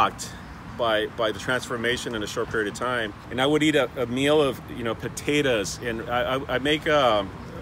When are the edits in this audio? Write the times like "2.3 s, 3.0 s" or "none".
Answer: 3.2 s